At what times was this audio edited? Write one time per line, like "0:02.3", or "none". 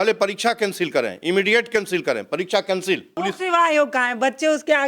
0:03.1